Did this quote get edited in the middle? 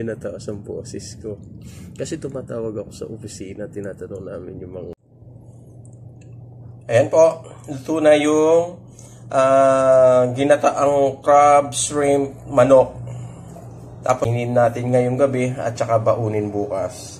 yes; 2 cuts; at 4.9 s, 14.3 s

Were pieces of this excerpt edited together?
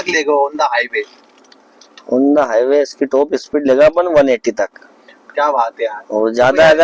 no; 0 cuts

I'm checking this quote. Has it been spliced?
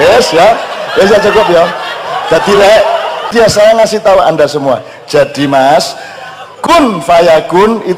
yes; 1 cut; at 3.3 s

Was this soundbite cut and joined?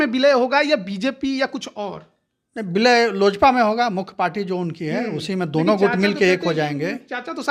no; 0 cuts

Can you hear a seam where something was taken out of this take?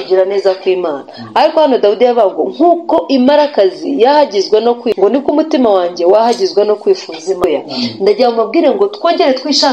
yes; 2 cuts; at 5.0 s, 7.4 s

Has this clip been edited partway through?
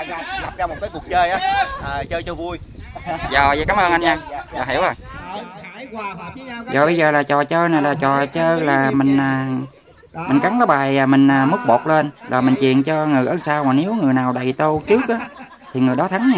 yes; 2 cuts; at 5.3 s, 6.7 s

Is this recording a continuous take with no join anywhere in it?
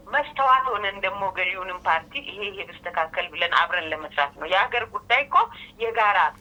yes; 0 cuts

